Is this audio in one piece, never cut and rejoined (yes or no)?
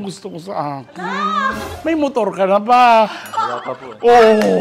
yes